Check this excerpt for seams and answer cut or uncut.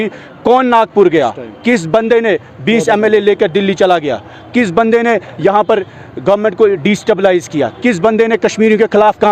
uncut